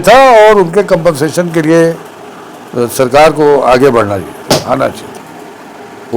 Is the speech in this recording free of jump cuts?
no; 1 cut; at 5.1 s

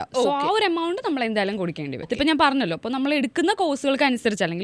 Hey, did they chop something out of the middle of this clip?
yes; 1 cut; at 1.9 s

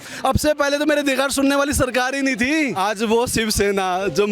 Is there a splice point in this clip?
yes; 1 cut; at 2.7 s

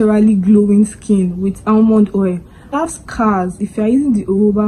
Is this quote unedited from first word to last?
no; 1 cut; at 2.7 s

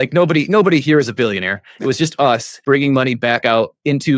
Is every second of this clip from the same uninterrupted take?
no; 1 cut; at 2.5 s

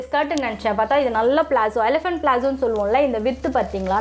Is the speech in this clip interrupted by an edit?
no; 0 cuts

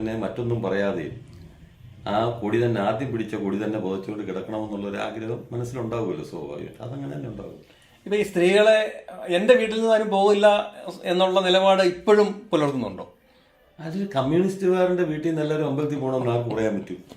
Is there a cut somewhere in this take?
no; 0 cuts

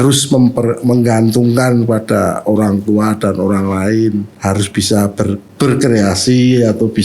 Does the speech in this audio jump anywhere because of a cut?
yes; 2 cuts; at 4.3 s, 5.5 s

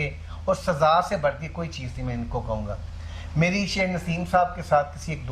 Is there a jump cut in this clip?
no; 0 cuts

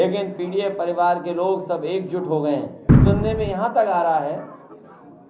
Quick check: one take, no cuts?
no; 1 cut; at 2.8 s

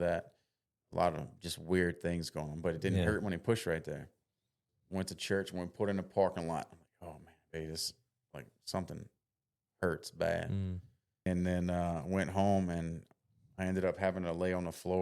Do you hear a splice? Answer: yes; 2 cuts; at 4.7 s, 11.3 s

